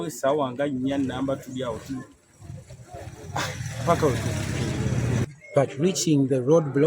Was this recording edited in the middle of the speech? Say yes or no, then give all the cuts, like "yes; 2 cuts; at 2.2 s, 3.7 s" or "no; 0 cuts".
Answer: yes; 1 cut; at 5.2 s